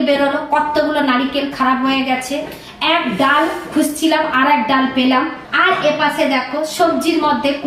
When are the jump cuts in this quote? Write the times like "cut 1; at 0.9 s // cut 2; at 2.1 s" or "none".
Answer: cut 1; at 5.4 s